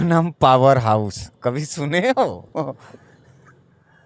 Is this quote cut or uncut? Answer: uncut